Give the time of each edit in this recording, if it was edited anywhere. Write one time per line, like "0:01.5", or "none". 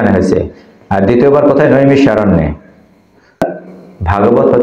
0:03.4